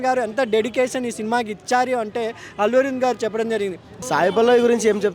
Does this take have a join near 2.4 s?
no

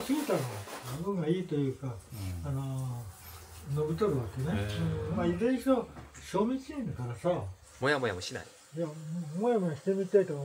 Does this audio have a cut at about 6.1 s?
no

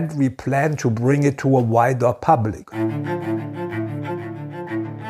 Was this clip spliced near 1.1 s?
no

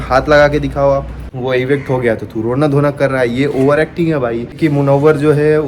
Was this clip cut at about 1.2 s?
yes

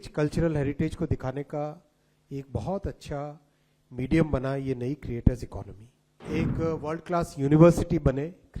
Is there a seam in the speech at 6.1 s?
yes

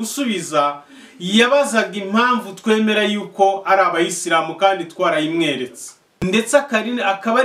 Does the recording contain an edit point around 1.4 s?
no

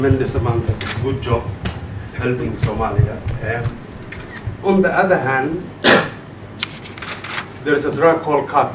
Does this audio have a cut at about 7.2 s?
no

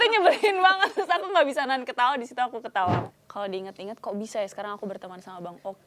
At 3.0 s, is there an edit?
yes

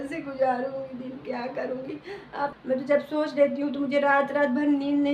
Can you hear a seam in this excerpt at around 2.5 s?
yes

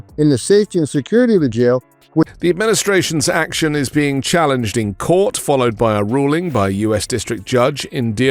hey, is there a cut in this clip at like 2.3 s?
yes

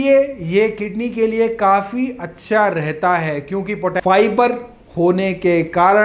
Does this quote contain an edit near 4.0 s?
yes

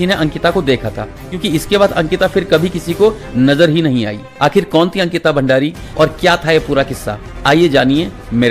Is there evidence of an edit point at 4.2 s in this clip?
yes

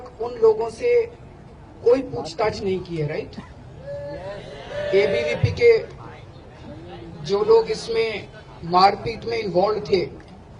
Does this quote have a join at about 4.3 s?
yes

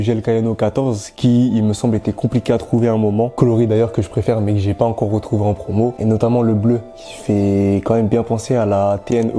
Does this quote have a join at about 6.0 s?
yes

